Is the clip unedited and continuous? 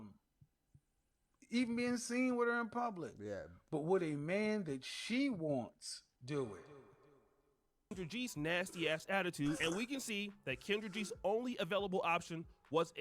no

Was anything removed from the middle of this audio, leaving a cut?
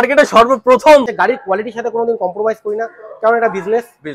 yes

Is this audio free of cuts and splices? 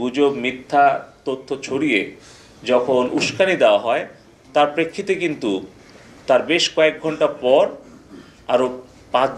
yes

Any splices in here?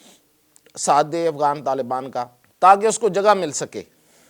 yes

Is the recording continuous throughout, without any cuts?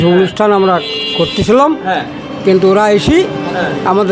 yes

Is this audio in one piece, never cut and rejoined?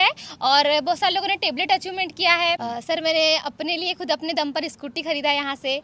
no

